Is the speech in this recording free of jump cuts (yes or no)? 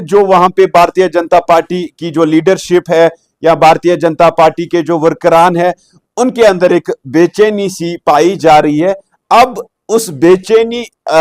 yes